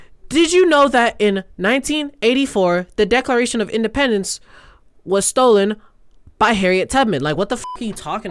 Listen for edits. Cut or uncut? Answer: uncut